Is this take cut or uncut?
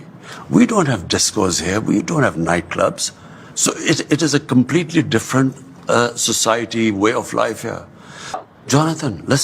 cut